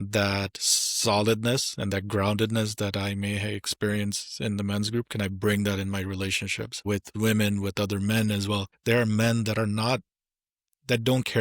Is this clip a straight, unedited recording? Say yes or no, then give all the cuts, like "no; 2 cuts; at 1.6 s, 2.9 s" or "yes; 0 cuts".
no; 2 cuts; at 7.1 s, 8.7 s